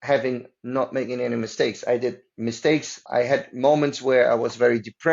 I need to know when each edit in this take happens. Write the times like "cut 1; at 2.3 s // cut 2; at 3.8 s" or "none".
cut 1; at 3.0 s